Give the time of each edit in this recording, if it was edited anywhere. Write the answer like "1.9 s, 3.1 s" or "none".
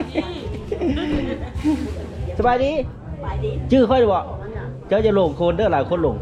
none